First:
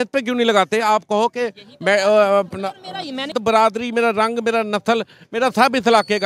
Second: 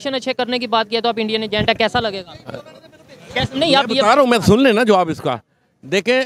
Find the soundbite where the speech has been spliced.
first; 1 cut; at 3.4 s

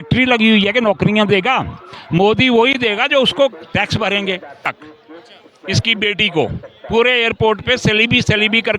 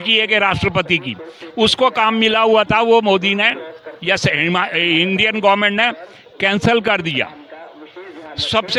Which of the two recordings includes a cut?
first; 1 cut; at 4.7 s

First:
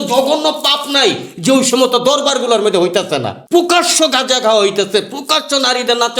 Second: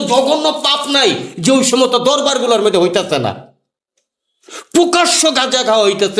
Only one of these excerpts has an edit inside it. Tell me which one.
first; 1 cut; at 3.4 s

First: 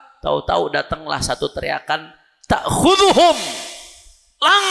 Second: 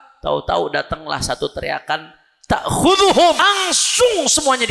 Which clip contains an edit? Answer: second; 1 cut; at 3.4 s

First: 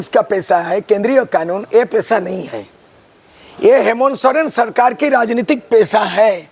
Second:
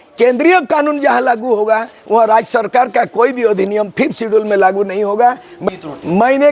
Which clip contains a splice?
second; 1 cut; at 5.5 s

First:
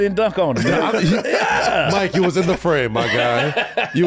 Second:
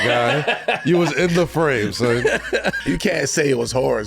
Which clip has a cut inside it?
second; 1 cut; at 2.7 s

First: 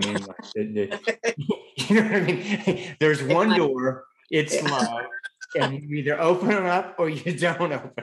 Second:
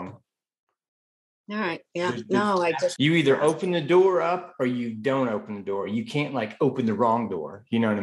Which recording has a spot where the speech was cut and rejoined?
second; 1 cut; at 2.9 s

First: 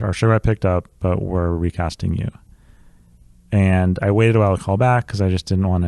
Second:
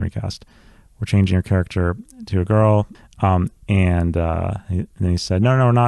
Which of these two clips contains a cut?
second; 1 cut; at 3.0 s

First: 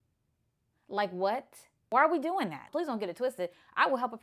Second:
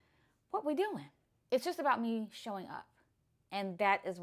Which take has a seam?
first; 1 cut; at 2.7 s

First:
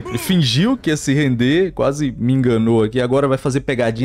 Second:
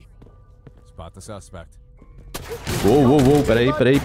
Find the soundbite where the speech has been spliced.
second; 1 cut; at 2.8 s

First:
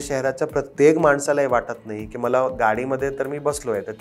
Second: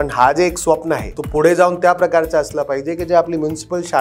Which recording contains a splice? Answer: second; 1 cut; at 1.1 s

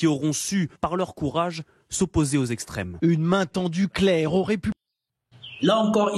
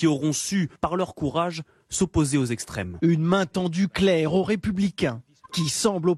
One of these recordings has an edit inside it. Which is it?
second; 1 cut; at 4.7 s

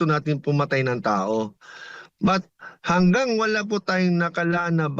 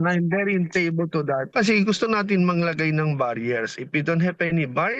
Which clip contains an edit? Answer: second; 1 cut; at 1.5 s

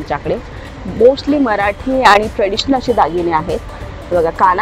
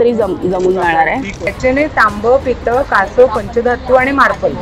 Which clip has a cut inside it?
second; 1 cut; at 1.5 s

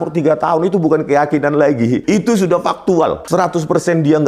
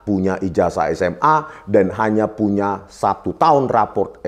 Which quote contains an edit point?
first; 2 cuts; at 2.0 s, 3.2 s

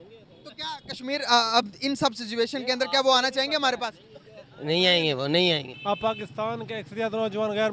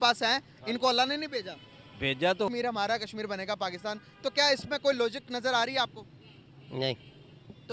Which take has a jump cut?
first; 1 cut; at 5.7 s

